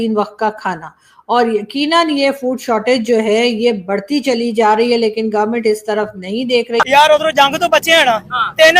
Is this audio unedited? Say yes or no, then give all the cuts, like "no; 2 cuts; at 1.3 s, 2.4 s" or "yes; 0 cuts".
no; 1 cut; at 6.8 s